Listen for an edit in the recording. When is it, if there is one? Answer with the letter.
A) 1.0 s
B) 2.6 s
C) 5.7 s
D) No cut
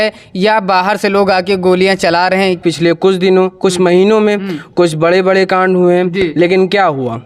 B